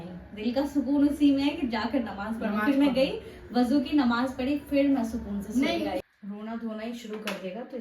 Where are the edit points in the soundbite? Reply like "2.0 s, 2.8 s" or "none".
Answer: 6.0 s